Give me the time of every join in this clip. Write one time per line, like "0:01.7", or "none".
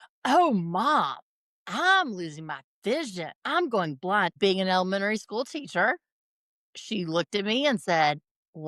0:03.4
0:04.4